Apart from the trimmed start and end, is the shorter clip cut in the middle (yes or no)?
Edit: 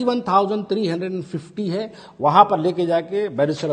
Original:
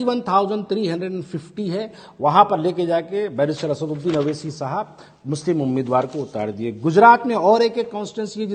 no